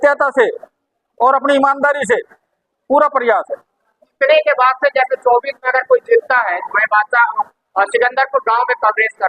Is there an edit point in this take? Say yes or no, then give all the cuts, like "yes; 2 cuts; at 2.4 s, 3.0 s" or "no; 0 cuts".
yes; 1 cut; at 4.1 s